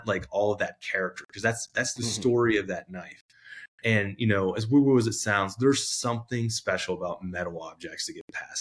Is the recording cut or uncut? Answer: uncut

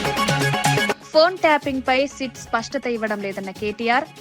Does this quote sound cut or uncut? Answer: cut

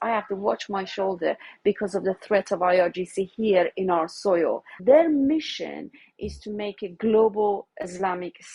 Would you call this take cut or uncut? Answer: cut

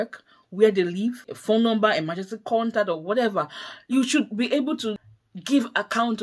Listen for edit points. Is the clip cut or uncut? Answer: cut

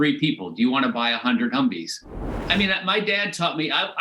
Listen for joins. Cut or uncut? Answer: cut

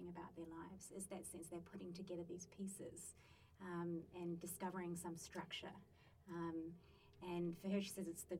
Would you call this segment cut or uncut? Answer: uncut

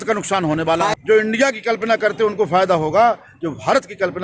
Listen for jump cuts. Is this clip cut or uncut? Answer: cut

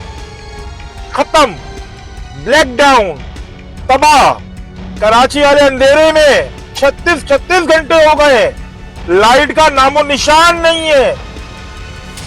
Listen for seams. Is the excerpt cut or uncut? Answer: cut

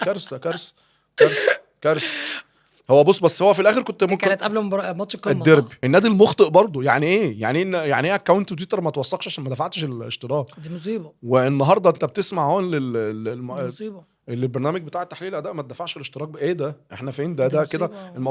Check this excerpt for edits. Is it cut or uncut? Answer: cut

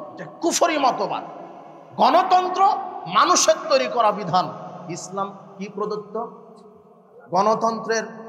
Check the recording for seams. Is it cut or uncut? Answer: uncut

